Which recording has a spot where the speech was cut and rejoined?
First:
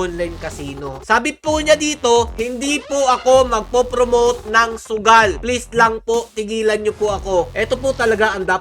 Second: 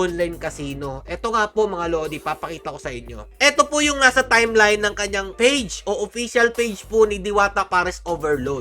first; 2 cuts; at 1.0 s, 7.5 s

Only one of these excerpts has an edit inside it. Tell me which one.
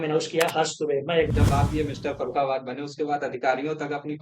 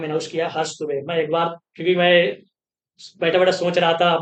first; 1 cut; at 1.3 s

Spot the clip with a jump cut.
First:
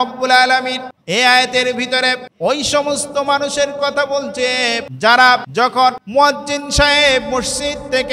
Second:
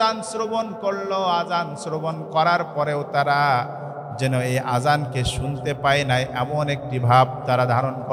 first; 4 cuts; at 0.9 s, 2.3 s, 4.9 s, 5.7 s

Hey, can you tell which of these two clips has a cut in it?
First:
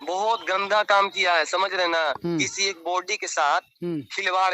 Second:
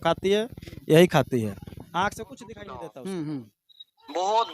second; 1 cut; at 2.6 s

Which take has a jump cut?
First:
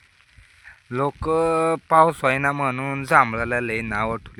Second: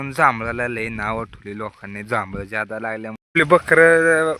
second; 1 cut; at 3.2 s

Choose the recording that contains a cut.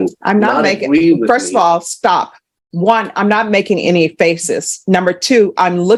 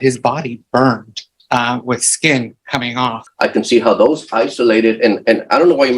second; 1 cut; at 3.2 s

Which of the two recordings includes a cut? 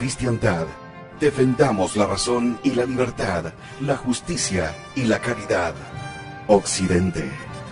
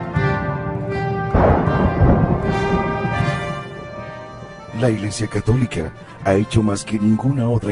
second; 1 cut; at 1.1 s

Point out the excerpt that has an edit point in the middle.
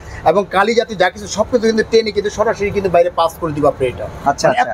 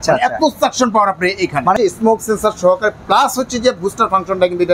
second; 1 cut; at 1.8 s

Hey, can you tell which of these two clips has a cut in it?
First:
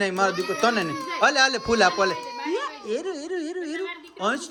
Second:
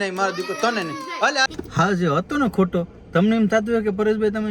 second; 1 cut; at 1.5 s

